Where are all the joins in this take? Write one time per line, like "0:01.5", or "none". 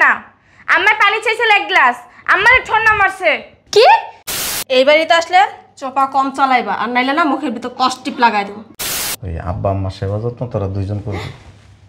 0:04.5
0:08.7